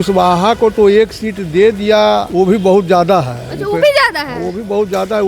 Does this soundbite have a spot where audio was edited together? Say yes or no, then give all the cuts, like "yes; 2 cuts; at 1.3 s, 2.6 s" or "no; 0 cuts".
yes; 1 cut; at 2.3 s